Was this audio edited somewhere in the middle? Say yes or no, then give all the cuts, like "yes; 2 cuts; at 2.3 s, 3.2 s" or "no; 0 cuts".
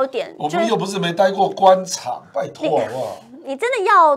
no; 0 cuts